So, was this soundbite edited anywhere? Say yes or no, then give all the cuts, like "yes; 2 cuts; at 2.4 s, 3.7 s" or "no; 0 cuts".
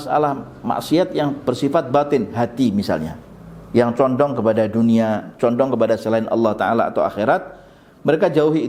no; 0 cuts